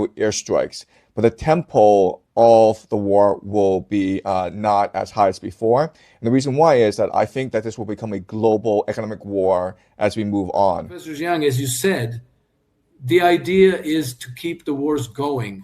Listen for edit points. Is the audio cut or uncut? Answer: cut